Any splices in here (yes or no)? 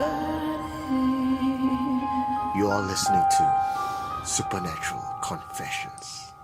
no